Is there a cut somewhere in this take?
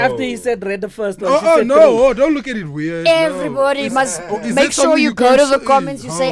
no; 0 cuts

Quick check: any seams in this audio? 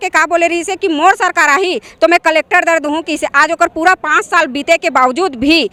no; 0 cuts

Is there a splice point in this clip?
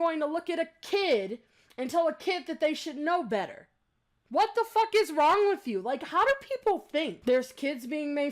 yes; 1 cut; at 7.2 s

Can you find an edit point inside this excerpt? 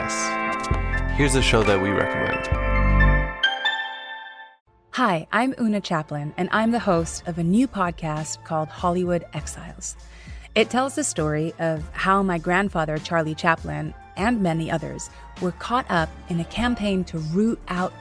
no; 0 cuts

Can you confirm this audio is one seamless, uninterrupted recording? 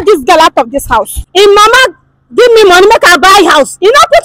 no; 1 cut; at 1.2 s

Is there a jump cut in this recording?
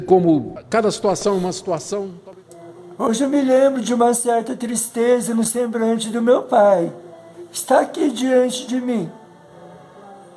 yes; 1 cut; at 2.2 s

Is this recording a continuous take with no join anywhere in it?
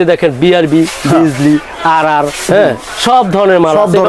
yes; 0 cuts

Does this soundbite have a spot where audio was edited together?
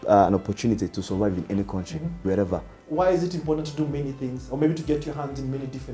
yes; 1 cut; at 2.7 s

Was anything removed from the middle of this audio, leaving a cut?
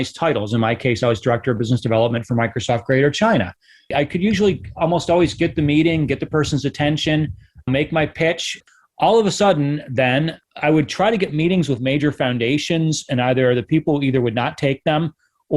yes; 1 cut; at 10.4 s

